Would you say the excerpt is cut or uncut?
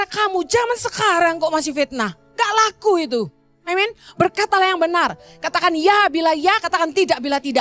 uncut